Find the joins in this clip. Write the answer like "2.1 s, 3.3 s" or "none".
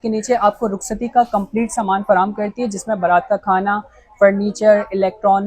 none